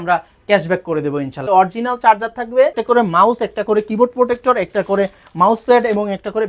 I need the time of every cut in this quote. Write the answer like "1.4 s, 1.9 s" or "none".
1.4 s, 2.8 s